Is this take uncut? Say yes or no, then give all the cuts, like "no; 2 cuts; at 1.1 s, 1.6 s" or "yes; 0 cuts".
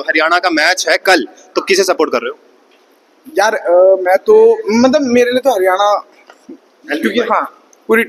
yes; 0 cuts